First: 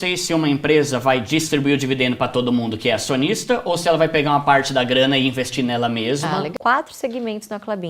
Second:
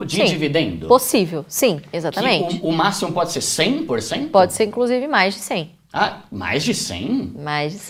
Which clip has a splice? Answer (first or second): first